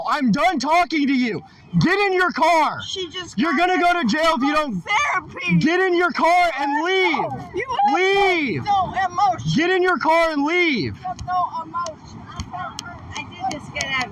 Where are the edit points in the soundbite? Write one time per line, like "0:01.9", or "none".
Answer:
none

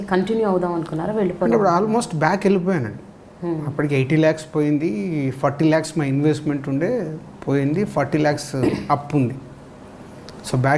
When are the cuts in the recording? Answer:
none

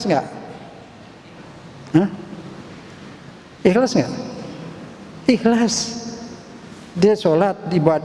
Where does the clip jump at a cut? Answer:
none

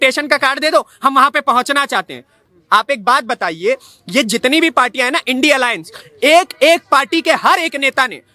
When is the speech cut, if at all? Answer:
0:02.4

